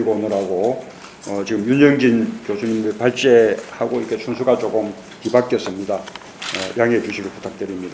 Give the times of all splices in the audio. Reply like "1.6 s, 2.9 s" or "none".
5.2 s